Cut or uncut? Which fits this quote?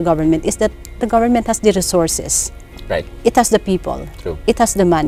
uncut